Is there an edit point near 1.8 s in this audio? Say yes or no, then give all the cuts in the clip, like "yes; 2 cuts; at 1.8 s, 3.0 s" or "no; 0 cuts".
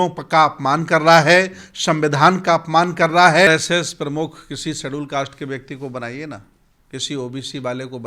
no; 1 cut; at 3.5 s